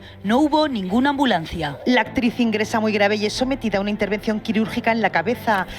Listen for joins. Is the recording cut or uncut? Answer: uncut